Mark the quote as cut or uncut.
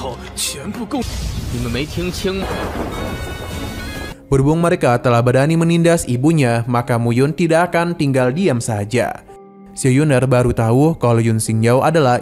uncut